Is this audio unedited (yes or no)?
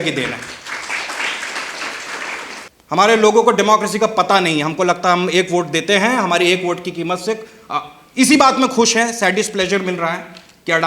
no